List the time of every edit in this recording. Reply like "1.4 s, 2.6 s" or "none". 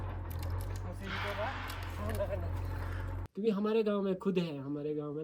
3.2 s